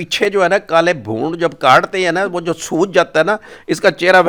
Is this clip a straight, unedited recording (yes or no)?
yes